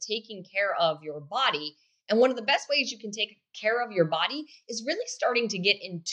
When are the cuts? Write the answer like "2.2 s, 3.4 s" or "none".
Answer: none

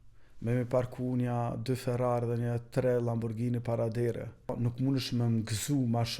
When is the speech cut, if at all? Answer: 4.5 s

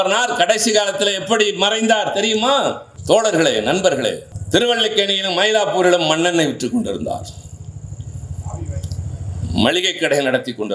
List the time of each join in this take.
2.9 s, 4.3 s

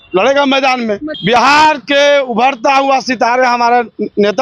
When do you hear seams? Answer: 1.1 s

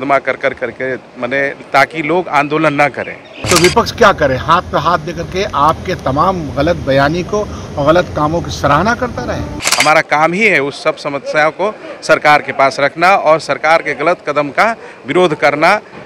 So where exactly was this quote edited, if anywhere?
3.5 s, 9.7 s

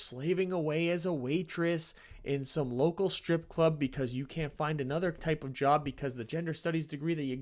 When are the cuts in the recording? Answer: none

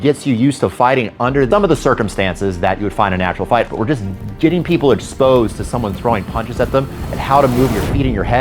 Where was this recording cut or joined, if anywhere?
1.5 s, 3.7 s

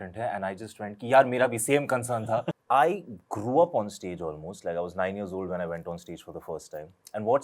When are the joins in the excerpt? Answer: 2.5 s

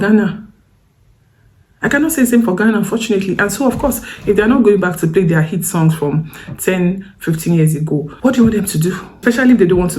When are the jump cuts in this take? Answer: 8.1 s, 9.1 s

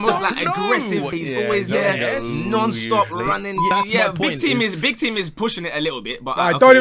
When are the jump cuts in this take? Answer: 1.1 s, 3.7 s

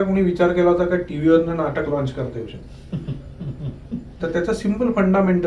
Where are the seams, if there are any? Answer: none

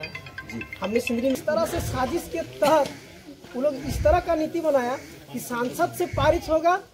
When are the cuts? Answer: 1.3 s

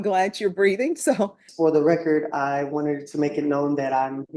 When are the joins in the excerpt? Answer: 1.4 s

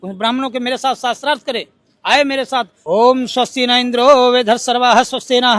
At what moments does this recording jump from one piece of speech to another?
2.8 s

